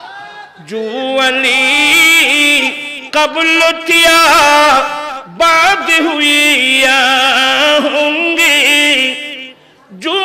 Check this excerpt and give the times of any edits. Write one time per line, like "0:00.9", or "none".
none